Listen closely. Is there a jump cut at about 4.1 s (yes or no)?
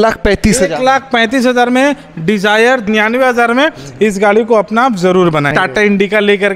no